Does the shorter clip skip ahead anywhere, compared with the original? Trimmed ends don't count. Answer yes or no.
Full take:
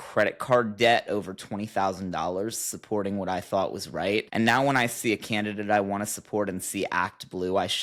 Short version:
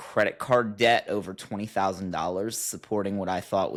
no